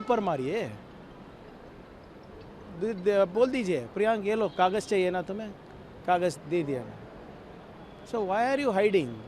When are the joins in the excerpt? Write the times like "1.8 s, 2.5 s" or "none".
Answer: none